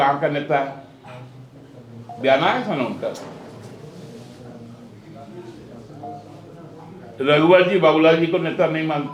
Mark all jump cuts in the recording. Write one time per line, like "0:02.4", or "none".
none